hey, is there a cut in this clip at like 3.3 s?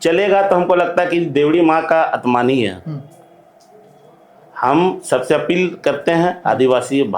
no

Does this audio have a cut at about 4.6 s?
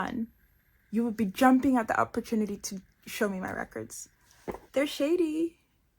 yes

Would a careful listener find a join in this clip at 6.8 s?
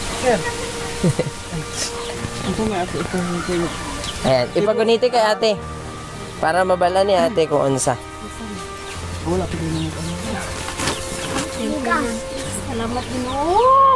no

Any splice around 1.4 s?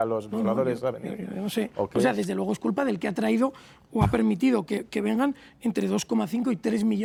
no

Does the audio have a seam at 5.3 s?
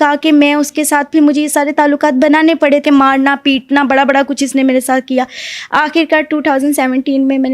no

